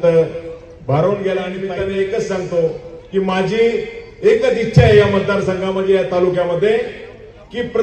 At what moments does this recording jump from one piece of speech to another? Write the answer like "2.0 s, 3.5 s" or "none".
1.7 s